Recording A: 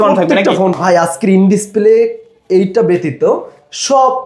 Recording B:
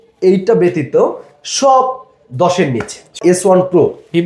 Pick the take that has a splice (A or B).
B